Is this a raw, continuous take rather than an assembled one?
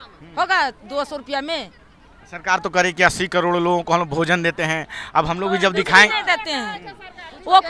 yes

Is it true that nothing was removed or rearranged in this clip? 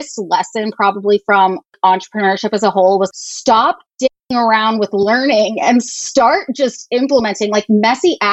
no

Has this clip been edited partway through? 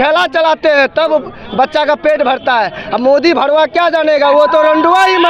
no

